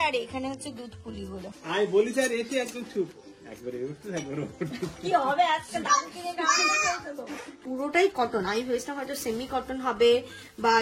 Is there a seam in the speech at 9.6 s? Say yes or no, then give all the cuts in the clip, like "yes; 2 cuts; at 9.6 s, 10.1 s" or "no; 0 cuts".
no; 2 cuts; at 1.5 s, 7.6 s